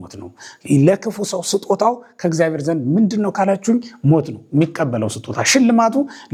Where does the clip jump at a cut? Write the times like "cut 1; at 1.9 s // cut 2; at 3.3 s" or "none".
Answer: none